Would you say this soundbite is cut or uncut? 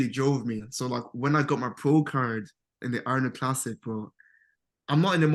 uncut